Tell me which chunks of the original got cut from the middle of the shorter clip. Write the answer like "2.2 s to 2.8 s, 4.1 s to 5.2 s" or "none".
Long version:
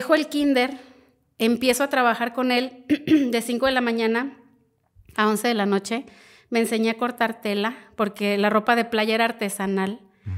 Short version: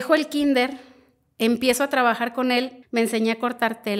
2.8 s to 6.3 s